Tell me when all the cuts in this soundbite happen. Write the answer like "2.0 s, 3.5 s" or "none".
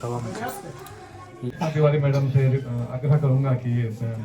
1.5 s